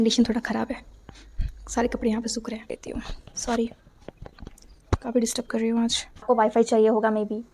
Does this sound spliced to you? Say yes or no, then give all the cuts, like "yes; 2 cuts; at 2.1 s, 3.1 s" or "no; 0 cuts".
yes; 2 cuts; at 2.7 s, 6.2 s